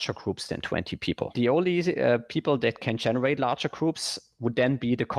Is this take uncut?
no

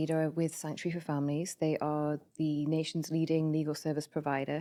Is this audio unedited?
yes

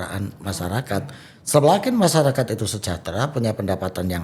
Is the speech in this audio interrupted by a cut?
no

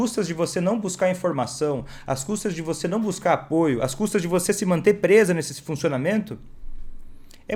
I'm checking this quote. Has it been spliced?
no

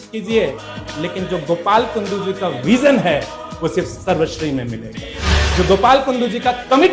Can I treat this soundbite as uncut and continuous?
yes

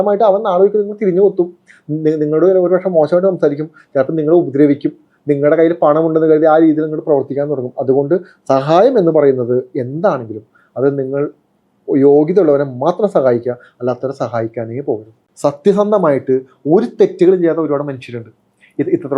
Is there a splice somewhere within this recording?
yes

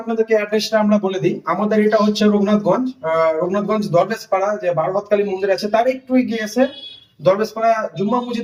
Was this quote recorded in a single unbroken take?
yes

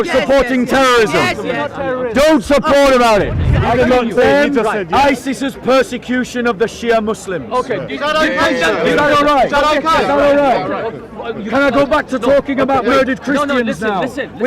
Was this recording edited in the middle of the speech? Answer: yes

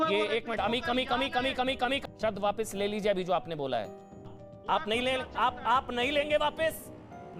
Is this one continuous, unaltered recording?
no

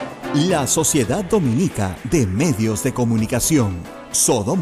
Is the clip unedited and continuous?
yes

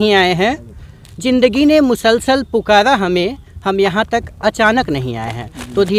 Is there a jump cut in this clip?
no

